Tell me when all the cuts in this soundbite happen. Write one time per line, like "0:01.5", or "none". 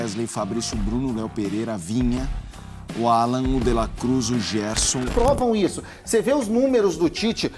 0:05.1